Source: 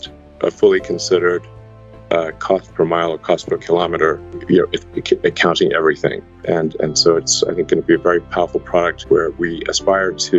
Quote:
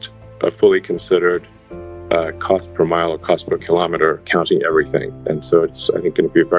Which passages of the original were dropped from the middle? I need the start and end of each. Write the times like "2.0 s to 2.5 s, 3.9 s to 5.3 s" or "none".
4.3 s to 5.4 s, 6.3 s to 6.7 s